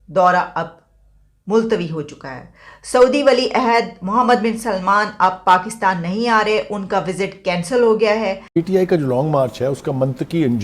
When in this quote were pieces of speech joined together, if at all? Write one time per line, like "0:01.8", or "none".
0:08.5